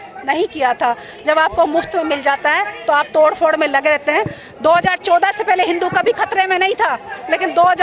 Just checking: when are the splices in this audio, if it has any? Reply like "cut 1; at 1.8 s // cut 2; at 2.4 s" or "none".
none